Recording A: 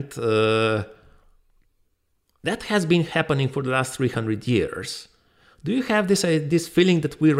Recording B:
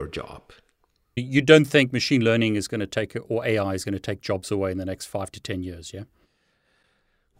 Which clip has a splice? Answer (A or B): B